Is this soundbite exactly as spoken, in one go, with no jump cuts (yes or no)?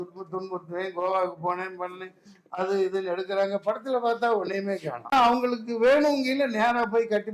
no